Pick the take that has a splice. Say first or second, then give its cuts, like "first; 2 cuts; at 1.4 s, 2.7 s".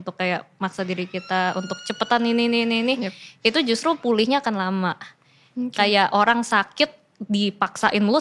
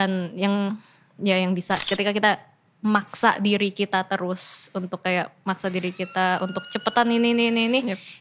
second; 1 cut; at 1.8 s